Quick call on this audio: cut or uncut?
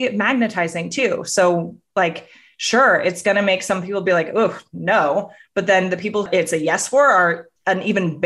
cut